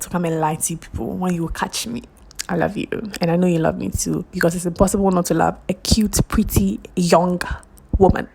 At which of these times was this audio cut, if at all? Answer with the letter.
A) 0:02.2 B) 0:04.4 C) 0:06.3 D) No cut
A